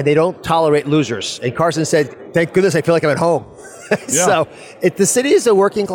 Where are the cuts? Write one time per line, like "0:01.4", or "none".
none